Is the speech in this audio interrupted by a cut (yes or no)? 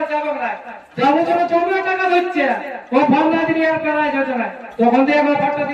no